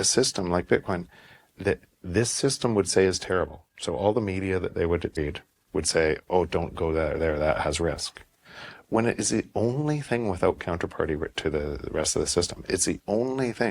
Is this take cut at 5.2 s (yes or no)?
yes